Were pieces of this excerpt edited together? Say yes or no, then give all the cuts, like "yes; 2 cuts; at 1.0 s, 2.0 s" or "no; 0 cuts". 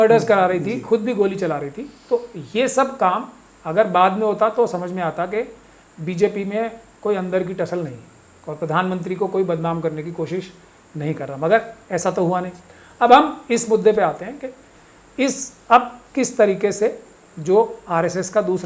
no; 0 cuts